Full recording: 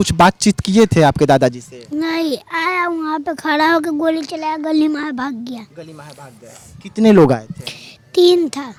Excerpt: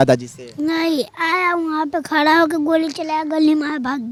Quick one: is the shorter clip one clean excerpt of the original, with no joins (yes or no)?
yes